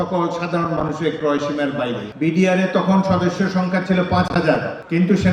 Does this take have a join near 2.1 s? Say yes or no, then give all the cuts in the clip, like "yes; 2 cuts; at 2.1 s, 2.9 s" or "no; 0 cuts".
yes; 1 cut; at 2.1 s